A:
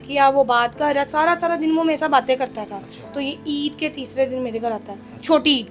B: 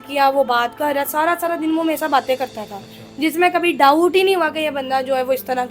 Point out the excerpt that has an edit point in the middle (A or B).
A